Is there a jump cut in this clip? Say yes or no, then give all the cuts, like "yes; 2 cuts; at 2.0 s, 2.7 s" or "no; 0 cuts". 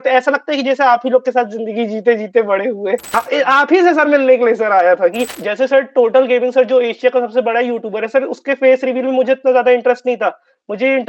yes; 2 cuts; at 3.1 s, 5.3 s